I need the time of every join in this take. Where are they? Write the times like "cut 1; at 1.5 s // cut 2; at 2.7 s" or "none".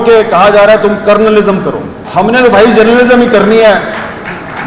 cut 1; at 2.0 s